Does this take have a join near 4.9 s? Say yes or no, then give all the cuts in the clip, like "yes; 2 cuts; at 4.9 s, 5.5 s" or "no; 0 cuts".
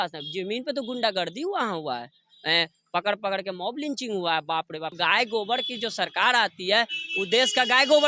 yes; 1 cut; at 4.9 s